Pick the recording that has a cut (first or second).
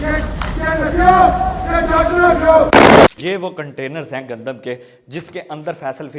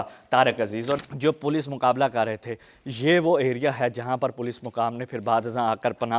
second